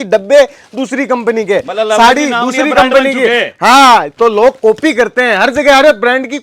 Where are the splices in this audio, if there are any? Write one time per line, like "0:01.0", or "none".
none

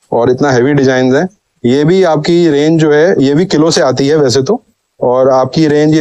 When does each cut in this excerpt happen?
none

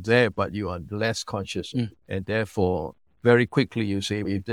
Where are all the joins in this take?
none

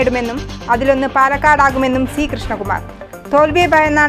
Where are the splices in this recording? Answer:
none

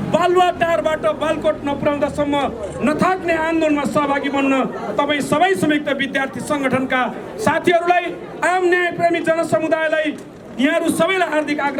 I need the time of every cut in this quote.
none

